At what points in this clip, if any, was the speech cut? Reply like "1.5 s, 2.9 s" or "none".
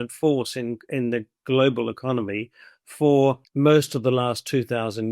3.4 s